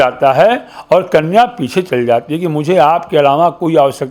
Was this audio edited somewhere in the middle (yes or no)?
no